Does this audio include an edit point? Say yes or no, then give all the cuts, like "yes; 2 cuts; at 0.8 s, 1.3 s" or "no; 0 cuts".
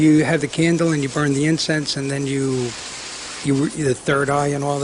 no; 0 cuts